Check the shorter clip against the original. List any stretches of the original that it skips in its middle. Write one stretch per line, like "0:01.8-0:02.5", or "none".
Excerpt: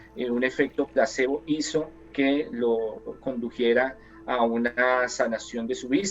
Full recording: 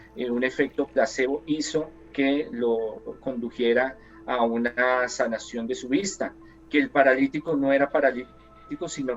none